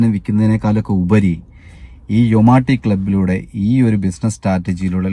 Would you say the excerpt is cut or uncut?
uncut